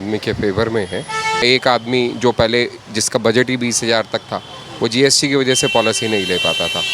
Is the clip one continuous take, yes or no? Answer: no